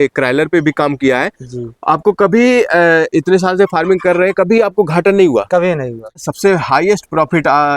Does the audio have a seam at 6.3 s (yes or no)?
yes